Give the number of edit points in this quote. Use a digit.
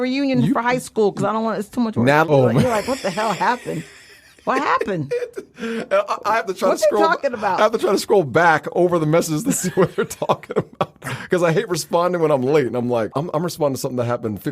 2